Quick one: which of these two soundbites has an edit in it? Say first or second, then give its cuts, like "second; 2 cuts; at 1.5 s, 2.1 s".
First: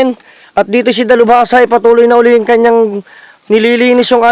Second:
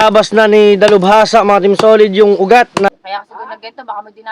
second; 1 cut; at 2.9 s